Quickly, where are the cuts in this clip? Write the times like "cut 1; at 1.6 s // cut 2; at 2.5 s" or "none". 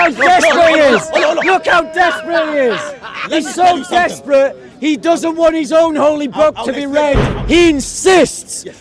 cut 1; at 7.3 s